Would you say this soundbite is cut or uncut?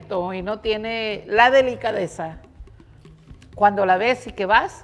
uncut